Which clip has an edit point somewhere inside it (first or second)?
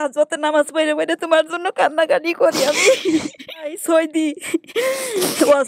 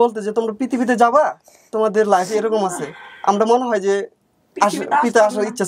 first